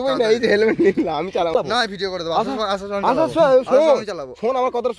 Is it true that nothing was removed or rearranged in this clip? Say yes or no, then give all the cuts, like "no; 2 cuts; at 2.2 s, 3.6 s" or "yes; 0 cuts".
no; 1 cut; at 1.6 s